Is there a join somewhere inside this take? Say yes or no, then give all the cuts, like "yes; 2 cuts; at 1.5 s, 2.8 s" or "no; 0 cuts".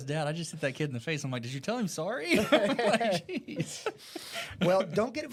no; 0 cuts